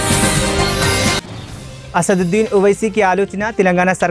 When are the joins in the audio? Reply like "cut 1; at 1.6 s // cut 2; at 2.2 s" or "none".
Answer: cut 1; at 1.1 s